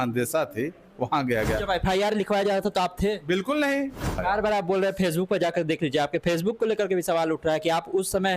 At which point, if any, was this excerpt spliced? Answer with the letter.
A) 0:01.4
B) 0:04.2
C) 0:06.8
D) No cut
B